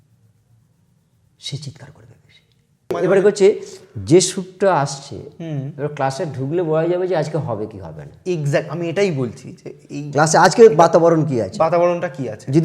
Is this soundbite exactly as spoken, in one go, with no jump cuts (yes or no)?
no